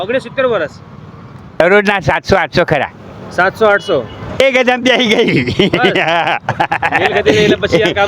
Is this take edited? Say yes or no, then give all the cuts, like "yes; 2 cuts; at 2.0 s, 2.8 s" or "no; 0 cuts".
yes; 2 cuts; at 1.6 s, 4.4 s